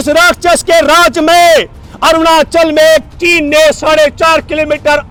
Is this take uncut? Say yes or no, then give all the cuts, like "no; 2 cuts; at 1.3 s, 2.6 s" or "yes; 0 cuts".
yes; 0 cuts